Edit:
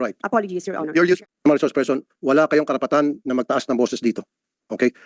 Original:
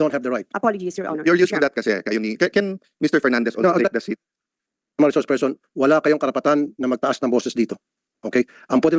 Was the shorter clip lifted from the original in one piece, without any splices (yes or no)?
no